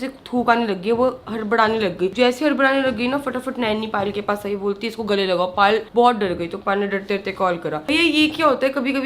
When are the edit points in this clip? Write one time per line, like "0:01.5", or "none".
none